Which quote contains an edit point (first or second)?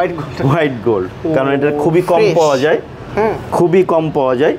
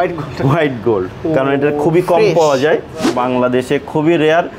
second